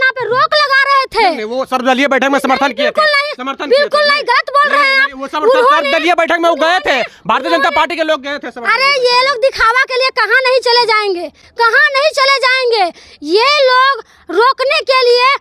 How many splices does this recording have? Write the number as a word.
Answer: zero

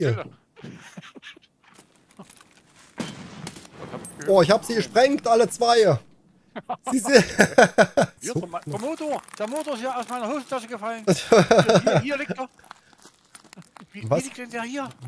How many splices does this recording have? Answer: two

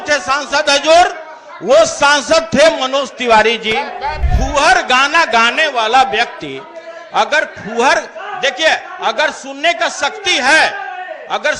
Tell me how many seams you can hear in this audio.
one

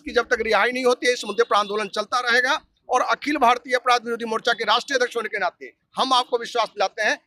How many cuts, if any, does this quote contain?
zero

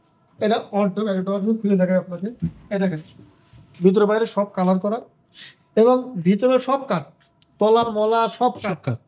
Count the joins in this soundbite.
zero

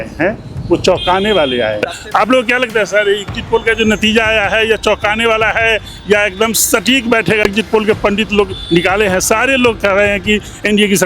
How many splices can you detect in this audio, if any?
two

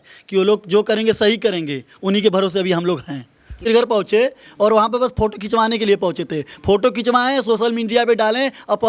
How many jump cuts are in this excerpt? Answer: one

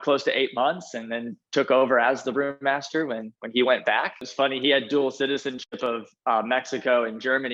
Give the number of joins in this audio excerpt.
one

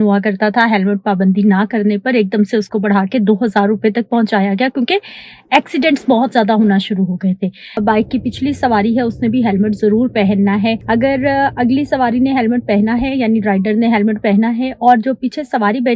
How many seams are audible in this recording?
two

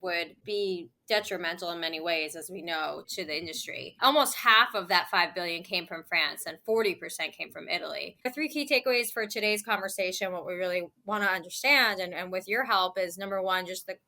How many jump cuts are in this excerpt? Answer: one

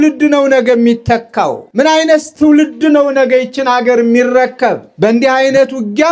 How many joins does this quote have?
one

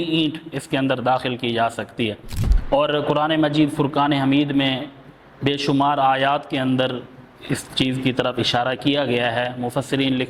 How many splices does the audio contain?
one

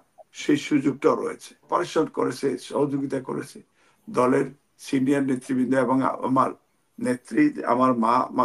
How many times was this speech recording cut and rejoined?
one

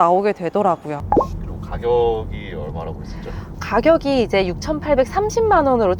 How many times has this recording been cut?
one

